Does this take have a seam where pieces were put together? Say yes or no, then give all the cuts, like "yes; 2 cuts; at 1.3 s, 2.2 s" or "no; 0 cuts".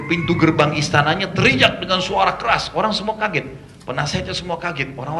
no; 0 cuts